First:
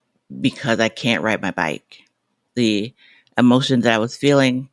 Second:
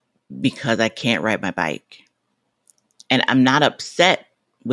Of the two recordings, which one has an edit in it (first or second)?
first